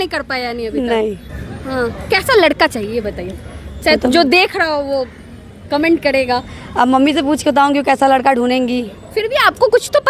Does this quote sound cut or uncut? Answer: uncut